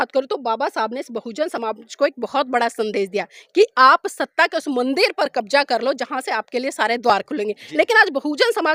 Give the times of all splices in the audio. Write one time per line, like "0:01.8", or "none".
none